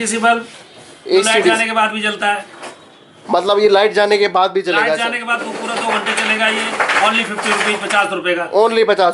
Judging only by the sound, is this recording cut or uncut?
uncut